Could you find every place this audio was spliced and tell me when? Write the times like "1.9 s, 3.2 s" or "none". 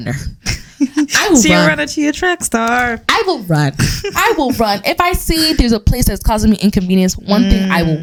none